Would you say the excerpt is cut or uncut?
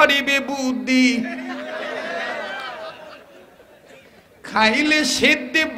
uncut